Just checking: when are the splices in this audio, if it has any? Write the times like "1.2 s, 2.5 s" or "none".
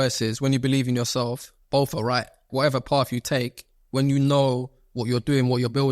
2.5 s